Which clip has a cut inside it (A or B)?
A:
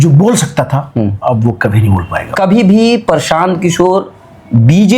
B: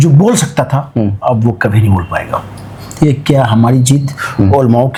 A